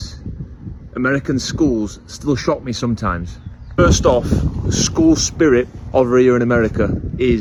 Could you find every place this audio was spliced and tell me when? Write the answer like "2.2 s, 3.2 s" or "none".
none

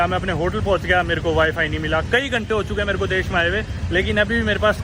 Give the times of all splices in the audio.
none

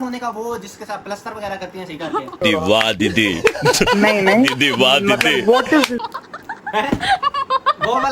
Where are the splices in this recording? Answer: none

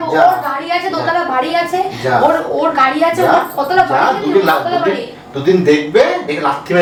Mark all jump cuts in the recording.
none

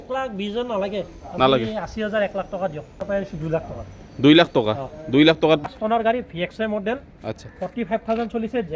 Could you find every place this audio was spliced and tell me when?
3.0 s, 5.6 s

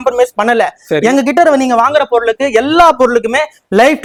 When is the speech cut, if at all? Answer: none

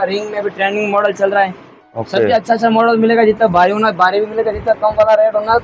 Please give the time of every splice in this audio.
none

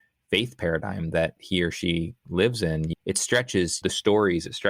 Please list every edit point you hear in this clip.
1.4 s, 2.9 s, 3.8 s

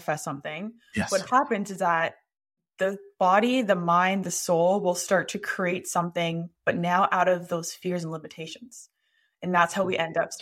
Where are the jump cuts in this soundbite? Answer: none

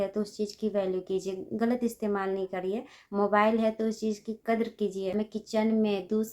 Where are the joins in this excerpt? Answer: 5.3 s

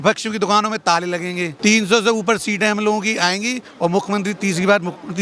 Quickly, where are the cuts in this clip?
none

